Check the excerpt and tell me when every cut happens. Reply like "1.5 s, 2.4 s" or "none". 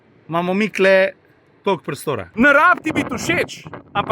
2.3 s